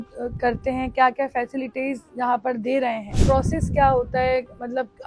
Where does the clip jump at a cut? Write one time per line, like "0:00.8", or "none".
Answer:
0:03.2